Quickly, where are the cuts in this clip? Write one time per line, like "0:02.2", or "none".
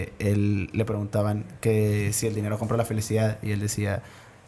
none